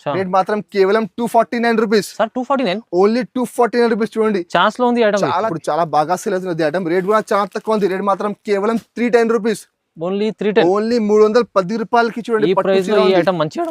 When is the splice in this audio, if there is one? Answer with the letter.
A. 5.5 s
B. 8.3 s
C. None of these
A